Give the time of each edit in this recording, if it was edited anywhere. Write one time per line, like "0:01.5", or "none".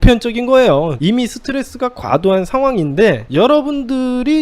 0:01.0